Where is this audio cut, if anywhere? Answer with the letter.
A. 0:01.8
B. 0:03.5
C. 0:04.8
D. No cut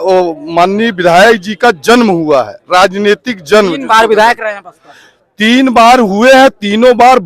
D